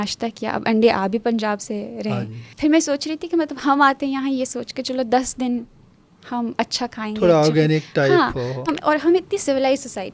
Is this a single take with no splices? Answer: no; 2 cuts; at 2.5 s, 8.7 s

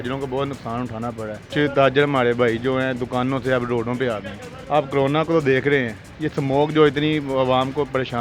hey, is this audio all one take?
no; 2 cuts; at 1.5 s, 4.5 s

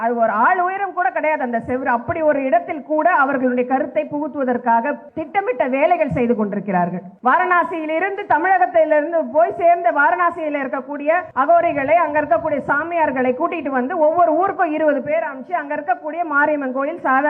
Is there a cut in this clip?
yes; 3 cuts; at 5.1 s, 7.1 s, 11.3 s

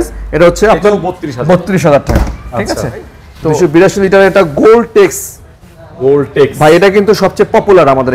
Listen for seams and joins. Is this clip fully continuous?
yes; 0 cuts

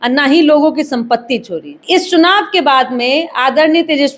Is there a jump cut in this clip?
yes; 1 cut; at 1.8 s

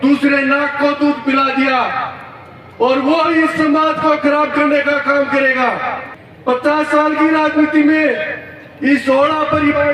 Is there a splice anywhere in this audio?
no; 0 cuts

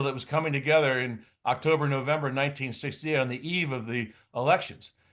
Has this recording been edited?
no; 0 cuts

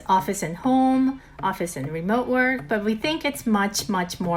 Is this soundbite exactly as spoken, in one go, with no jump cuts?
yes; 0 cuts

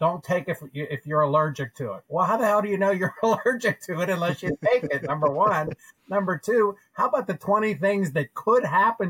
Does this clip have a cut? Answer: no; 0 cuts

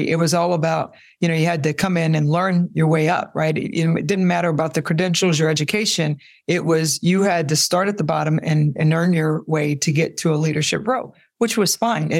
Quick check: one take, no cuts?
yes; 0 cuts

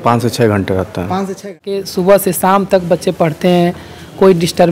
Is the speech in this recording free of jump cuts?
no; 1 cut; at 1.9 s

